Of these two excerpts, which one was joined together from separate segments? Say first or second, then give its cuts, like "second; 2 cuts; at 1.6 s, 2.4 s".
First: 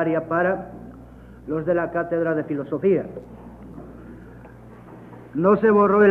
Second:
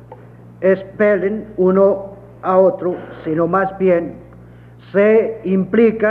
first; 1 cut; at 5.0 s